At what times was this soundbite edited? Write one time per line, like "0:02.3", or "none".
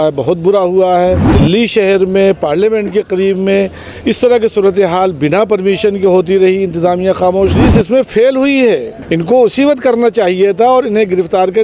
0:01.3
0:07.6
0:09.0